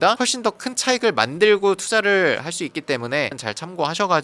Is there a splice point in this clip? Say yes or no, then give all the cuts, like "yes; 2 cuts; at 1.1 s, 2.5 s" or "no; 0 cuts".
yes; 1 cut; at 3.3 s